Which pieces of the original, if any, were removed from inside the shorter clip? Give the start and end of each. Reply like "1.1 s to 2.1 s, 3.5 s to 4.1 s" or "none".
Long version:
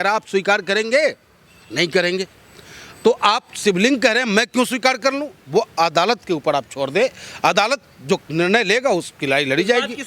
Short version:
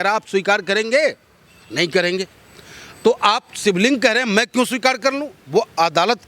none

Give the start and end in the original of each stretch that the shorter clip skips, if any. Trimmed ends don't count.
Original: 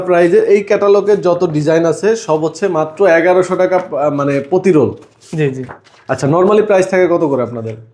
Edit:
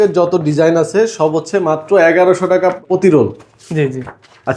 3.9 s to 4.4 s

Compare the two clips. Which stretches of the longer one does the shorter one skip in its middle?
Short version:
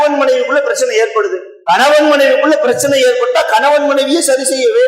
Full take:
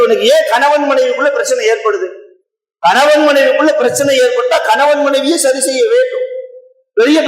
2.2 s to 2.6 s

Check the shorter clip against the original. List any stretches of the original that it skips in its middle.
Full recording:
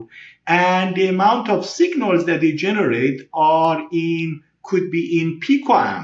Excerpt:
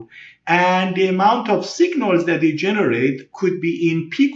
3.2 s to 4.5 s

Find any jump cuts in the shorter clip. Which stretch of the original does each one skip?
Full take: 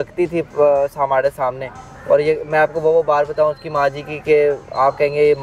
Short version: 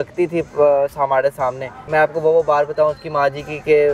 1.8 s to 2.4 s

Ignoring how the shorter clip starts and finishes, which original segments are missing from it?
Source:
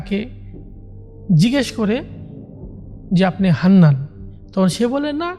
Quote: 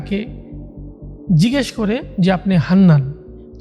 2.1 s to 3.0 s

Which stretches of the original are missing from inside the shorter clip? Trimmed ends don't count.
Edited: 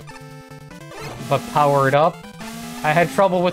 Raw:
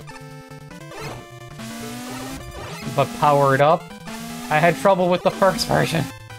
1.2 s to 2.8 s

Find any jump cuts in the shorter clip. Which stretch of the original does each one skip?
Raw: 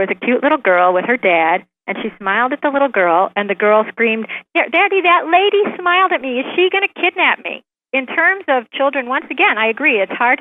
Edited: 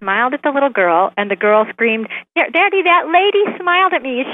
none

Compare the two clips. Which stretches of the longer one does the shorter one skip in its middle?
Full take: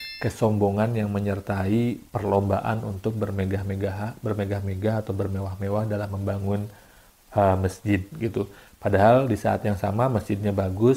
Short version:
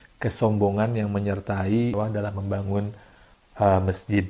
1.9 s to 5.7 s

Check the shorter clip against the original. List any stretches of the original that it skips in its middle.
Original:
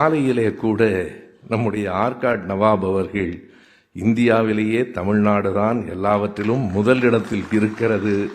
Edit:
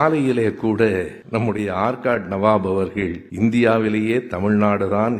1.2 s to 1.3 s, 3.4 s to 3.9 s

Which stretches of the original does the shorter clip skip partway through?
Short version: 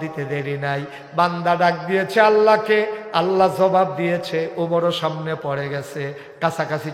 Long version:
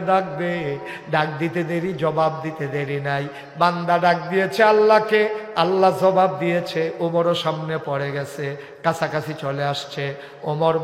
none

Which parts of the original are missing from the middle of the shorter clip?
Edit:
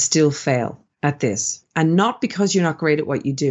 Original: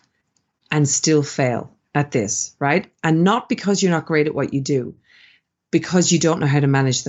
2.5 s to 2.9 s

